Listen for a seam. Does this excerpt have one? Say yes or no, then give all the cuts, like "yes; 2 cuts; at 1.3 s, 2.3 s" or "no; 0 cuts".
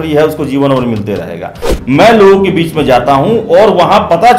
yes; 1 cut; at 1.7 s